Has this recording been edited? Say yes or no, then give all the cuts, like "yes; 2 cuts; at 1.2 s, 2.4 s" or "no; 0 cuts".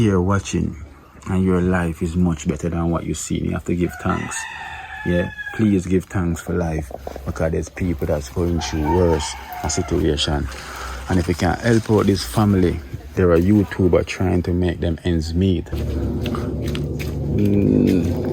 yes; 1 cut; at 15.8 s